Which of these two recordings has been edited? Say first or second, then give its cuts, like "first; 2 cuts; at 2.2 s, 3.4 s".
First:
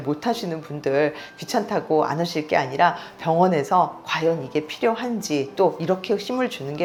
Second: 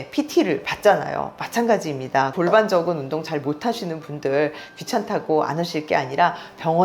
second; 1 cut; at 2.3 s